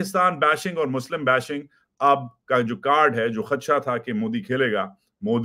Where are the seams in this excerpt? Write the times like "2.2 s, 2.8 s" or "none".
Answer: none